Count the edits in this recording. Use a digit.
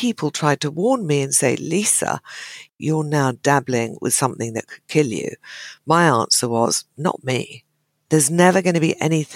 2